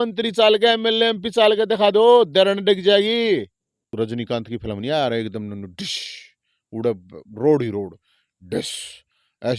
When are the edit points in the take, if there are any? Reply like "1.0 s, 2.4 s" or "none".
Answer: 3.8 s